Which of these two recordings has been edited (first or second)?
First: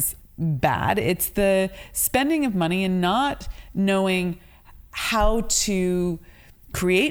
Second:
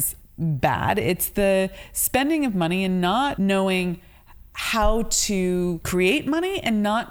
second